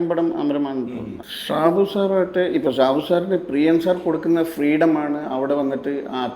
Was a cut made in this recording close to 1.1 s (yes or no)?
yes